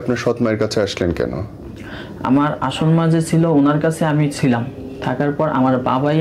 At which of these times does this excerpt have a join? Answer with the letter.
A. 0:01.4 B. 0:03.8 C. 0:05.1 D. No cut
D